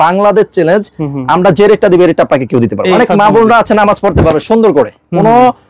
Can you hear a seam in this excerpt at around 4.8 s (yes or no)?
no